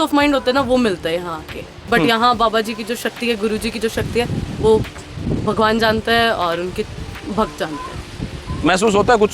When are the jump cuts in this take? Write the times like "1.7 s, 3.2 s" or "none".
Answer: 2.1 s

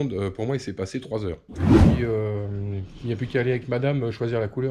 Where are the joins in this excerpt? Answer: 1.4 s, 2.0 s

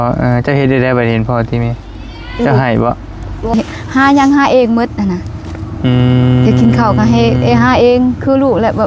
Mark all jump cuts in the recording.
3.5 s

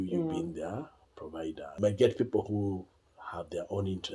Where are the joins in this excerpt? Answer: 1.7 s

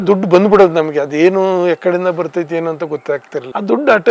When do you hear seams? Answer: none

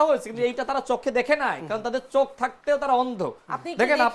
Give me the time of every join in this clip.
none

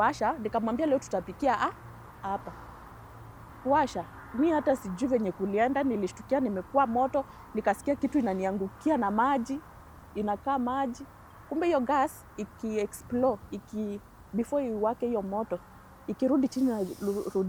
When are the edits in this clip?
none

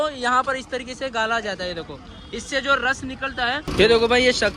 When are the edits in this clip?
3.7 s

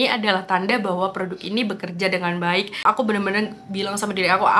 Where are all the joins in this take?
2.8 s

